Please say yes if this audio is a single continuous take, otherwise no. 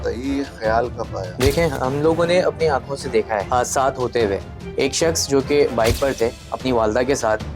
no